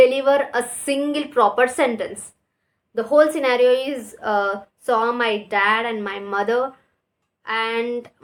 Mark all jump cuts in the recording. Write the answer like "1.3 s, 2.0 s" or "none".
none